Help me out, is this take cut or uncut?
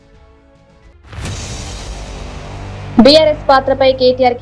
cut